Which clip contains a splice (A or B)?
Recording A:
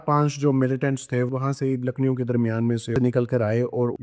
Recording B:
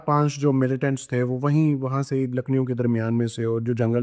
A